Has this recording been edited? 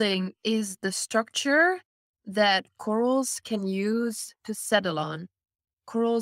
no; 0 cuts

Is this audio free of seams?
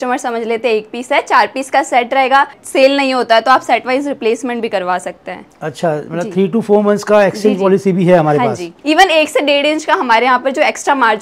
no; 2 cuts; at 2.6 s, 8.7 s

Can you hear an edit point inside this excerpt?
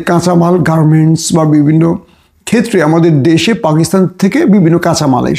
no; 0 cuts

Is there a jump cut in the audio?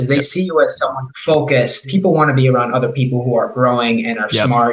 yes; 2 cuts; at 1.1 s, 1.8 s

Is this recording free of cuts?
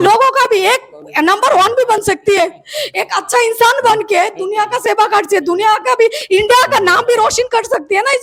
yes; 0 cuts

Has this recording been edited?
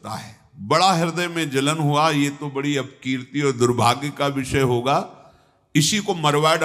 no; 0 cuts

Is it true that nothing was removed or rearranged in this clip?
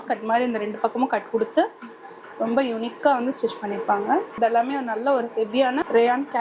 no; 1 cut; at 4.3 s

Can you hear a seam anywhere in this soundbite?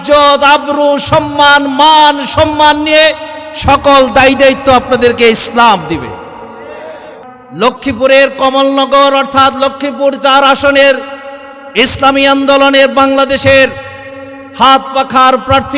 yes; 1 cut; at 7.3 s

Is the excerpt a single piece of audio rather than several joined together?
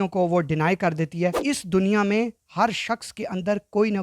no; 1 cut; at 1.4 s

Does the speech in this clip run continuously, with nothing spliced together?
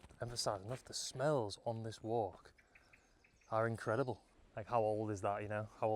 no; 1 cut; at 4.3 s

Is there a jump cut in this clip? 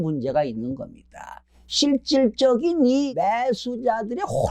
yes; 2 cuts; at 1.4 s, 3.1 s

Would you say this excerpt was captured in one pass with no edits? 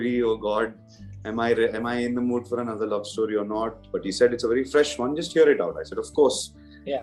yes; 0 cuts

